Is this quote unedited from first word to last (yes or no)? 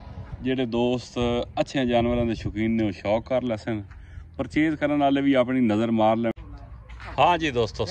no